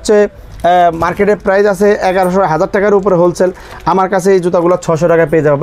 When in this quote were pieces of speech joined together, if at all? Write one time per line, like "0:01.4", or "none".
none